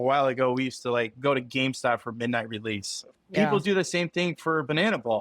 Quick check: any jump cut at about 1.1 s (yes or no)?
no